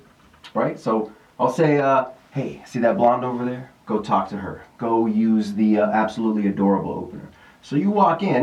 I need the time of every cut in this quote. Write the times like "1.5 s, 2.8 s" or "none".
none